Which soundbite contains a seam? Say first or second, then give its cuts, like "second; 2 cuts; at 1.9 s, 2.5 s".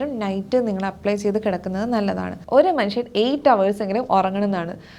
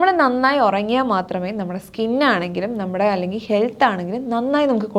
first; 1 cut; at 2.4 s